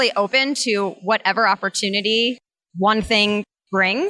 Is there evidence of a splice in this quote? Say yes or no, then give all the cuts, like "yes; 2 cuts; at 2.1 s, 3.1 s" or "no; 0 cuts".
no; 0 cuts